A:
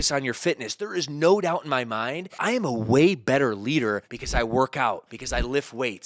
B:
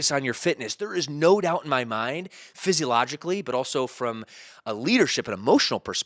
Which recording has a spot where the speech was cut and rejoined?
A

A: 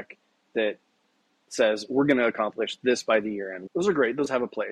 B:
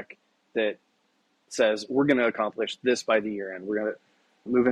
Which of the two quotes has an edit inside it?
A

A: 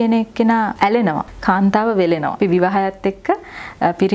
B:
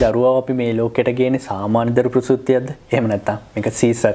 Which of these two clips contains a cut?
A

